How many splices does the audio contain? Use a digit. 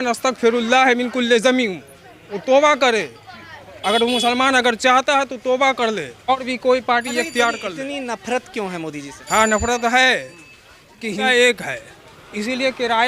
2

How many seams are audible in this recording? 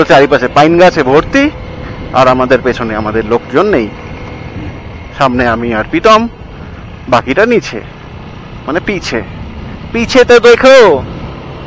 0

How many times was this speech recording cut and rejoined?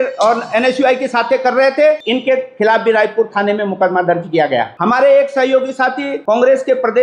3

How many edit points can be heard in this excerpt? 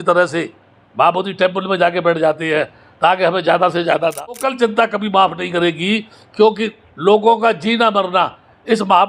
1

